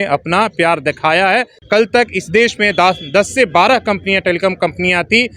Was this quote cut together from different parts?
yes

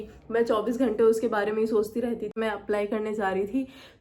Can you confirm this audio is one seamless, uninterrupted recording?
no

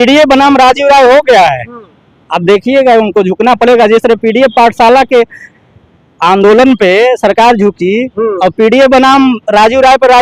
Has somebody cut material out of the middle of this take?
no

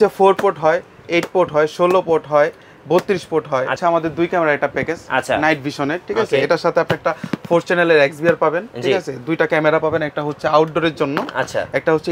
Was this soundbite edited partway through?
yes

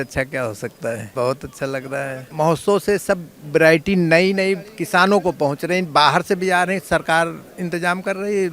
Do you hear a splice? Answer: yes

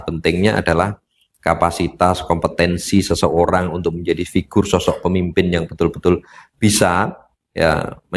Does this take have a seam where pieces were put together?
no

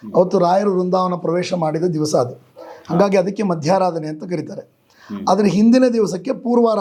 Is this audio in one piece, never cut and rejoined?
yes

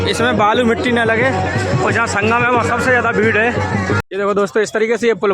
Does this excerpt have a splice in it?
yes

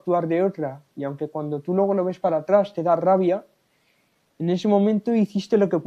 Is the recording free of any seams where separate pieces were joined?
yes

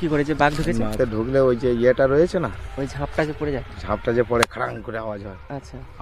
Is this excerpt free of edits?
no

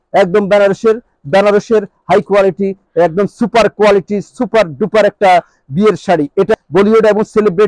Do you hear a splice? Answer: yes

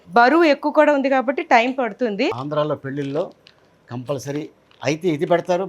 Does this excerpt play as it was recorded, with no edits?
no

